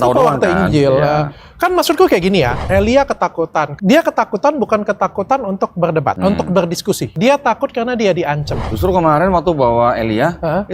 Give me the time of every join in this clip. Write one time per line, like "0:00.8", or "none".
0:02.6
0:03.7
0:06.2
0:07.1
0:08.6